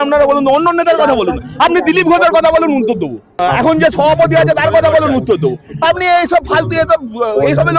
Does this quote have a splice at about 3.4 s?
yes; 1 cut; at 3.4 s

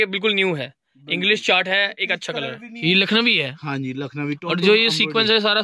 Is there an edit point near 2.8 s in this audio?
yes; 1 cut; at 2.8 s

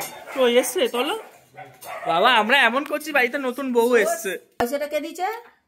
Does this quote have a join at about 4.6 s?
yes; 1 cut; at 4.6 s

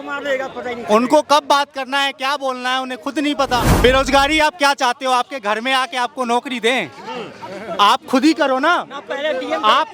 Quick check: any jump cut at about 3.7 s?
yes; 1 cut; at 3.7 s

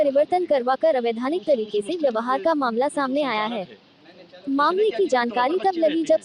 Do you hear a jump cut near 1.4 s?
yes; 1 cut; at 1.4 s

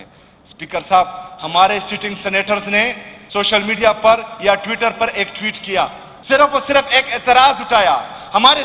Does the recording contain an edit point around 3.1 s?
yes; 2 cuts; at 3.1 s, 6.1 s

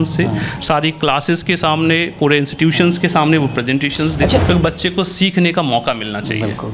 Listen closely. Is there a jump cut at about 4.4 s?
yes; 1 cut; at 4.4 s

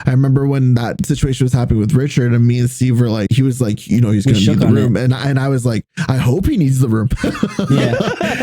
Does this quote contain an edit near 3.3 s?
yes; 2 cuts; at 1.0 s, 3.3 s

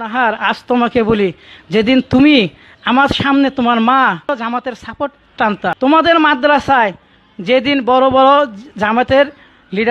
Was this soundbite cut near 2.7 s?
no; 2 cuts; at 4.2 s, 5.8 s

